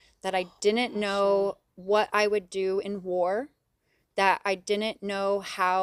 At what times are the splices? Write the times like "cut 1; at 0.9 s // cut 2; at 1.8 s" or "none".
none